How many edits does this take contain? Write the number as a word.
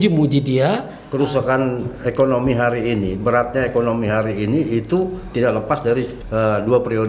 two